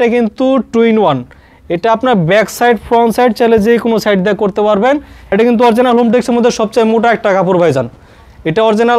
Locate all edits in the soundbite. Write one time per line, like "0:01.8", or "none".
0:05.3

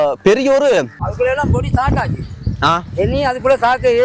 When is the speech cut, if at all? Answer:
0:01.0

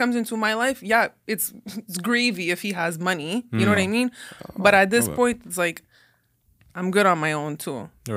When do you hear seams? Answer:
none

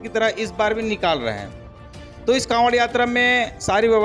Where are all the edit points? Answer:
none

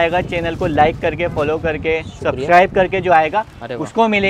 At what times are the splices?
none

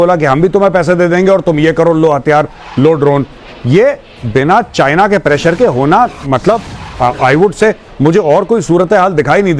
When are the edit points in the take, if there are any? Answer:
none

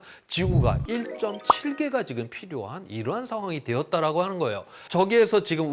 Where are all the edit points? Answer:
0:04.8

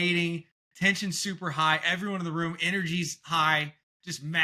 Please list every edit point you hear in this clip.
none

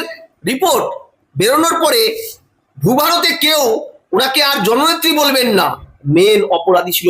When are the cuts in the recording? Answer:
0:05.9

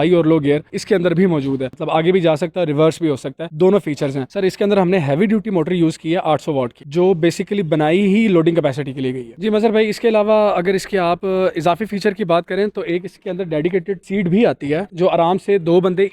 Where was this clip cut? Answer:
0:01.7
0:04.3
0:09.2

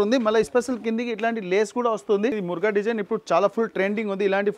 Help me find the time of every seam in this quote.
0:02.4

